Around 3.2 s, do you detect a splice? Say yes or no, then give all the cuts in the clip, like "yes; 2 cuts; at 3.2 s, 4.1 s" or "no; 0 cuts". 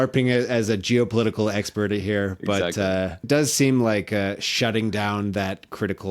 yes; 1 cut; at 3.2 s